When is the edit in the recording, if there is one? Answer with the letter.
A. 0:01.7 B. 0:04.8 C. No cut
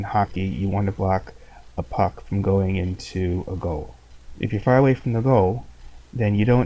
B